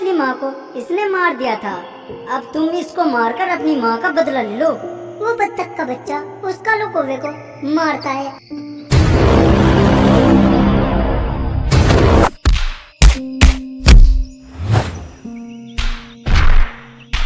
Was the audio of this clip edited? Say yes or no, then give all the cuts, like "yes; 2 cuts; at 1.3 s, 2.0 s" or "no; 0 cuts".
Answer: no; 0 cuts